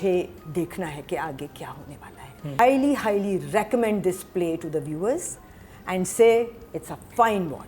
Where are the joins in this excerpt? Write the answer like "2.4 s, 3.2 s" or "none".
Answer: 2.6 s